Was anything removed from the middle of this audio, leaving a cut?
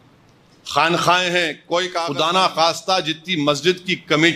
yes; 1 cut; at 2.0 s

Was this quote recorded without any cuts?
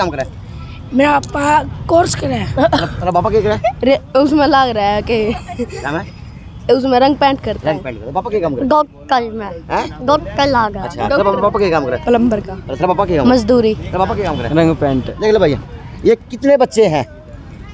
yes; 0 cuts

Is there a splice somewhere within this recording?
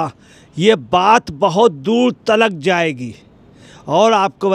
no; 0 cuts

